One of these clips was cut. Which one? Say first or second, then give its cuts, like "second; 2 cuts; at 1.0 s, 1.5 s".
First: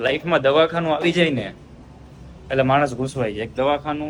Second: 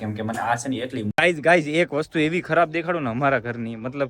second; 1 cut; at 1.1 s